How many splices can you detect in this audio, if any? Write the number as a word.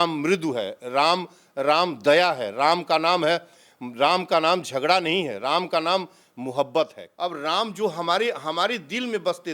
one